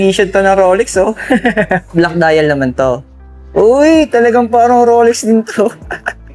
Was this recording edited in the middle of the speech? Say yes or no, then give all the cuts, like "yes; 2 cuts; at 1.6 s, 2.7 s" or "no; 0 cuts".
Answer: yes; 1 cut; at 1.9 s